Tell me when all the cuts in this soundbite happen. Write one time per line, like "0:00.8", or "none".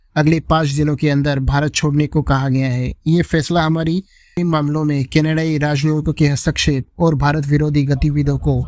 0:04.4